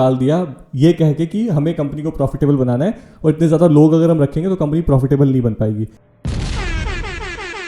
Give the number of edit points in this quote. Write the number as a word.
zero